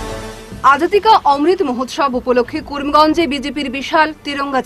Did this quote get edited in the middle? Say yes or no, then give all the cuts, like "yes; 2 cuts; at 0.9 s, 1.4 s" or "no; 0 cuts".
no; 0 cuts